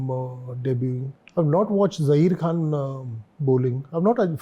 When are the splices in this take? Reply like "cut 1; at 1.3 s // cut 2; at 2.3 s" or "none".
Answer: cut 1; at 1.1 s

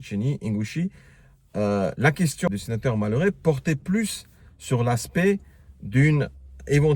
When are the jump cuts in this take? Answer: cut 1; at 2.5 s

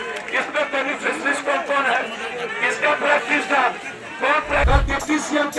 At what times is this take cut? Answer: cut 1; at 4.7 s

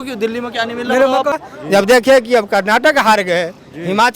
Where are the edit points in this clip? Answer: cut 1; at 1.4 s

